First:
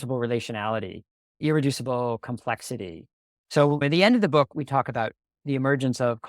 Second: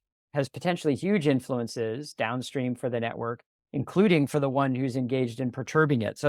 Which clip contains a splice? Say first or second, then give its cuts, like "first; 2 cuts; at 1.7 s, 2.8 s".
first; 2 cuts; at 1.4 s, 4.5 s